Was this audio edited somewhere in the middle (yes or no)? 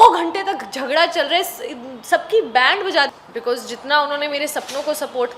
yes